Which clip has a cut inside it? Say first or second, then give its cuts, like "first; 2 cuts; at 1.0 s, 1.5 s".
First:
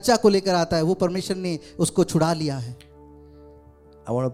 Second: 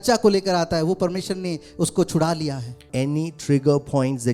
second; 1 cut; at 2.8 s